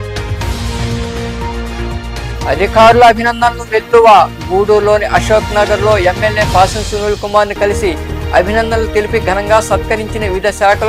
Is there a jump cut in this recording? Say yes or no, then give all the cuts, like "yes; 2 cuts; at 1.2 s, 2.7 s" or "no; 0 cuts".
no; 0 cuts